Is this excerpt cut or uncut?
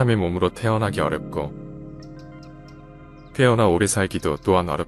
uncut